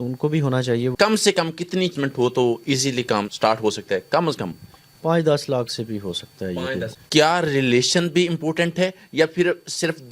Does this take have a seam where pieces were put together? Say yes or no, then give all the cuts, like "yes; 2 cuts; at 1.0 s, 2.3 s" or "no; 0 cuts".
yes; 4 cuts; at 0.9 s, 1.9 s, 3.3 s, 6.9 s